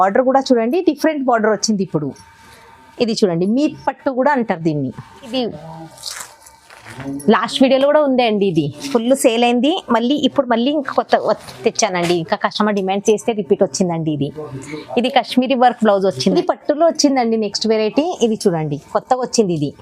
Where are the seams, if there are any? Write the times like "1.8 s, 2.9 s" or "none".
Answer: 5.3 s, 16.3 s